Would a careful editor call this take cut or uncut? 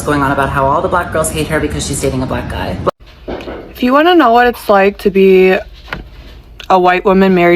cut